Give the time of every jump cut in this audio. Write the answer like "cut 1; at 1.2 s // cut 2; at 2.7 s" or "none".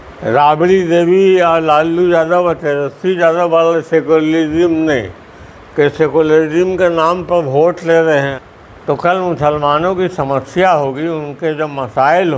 cut 1; at 8.4 s

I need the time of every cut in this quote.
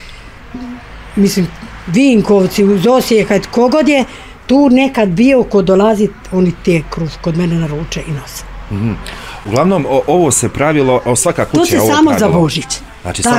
none

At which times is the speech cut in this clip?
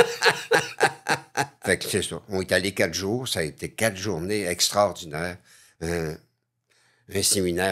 cut 1; at 1.5 s

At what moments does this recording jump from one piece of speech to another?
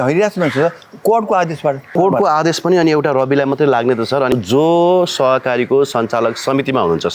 cut 1; at 1.9 s // cut 2; at 4.3 s

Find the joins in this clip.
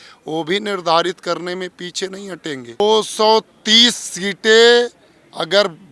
cut 1; at 2.8 s

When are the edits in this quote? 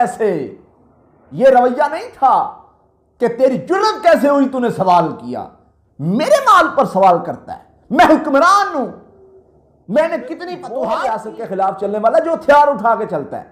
cut 1; at 10.8 s

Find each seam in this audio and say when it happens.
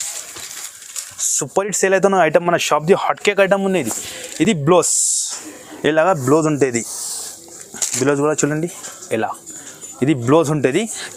none

